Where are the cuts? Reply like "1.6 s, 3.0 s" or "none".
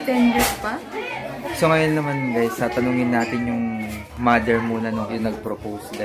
1.4 s, 5.1 s